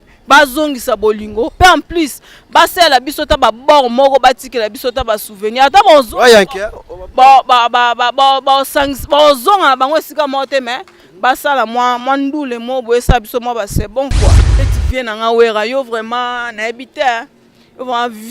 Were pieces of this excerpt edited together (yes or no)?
yes